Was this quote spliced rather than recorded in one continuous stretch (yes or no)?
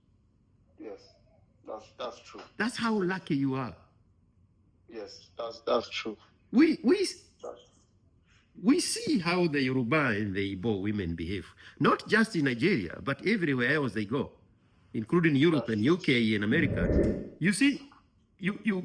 yes